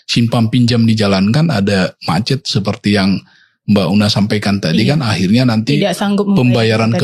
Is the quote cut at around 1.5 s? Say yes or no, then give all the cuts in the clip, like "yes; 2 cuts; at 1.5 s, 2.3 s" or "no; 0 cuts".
no; 0 cuts